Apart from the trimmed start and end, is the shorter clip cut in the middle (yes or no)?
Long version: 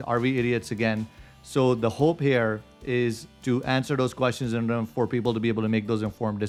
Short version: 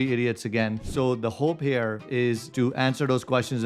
yes